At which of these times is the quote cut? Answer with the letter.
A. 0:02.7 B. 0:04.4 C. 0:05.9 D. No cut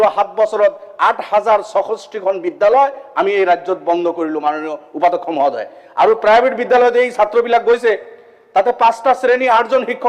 D